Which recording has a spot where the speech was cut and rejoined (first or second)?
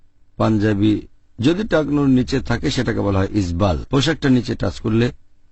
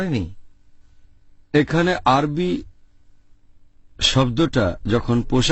first